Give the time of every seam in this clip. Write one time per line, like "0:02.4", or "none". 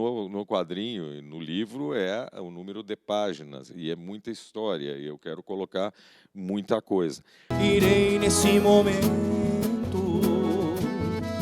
0:07.5